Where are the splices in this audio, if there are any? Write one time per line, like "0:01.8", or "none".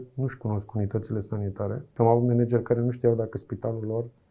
0:01.8